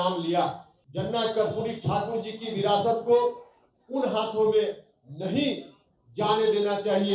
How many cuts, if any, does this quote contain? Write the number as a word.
one